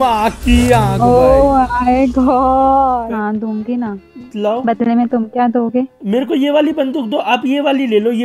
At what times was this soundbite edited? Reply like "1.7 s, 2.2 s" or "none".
3.1 s